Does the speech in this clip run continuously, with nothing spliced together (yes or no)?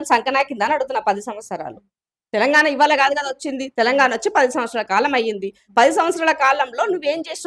yes